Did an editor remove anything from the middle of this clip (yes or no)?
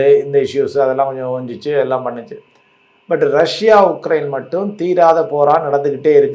no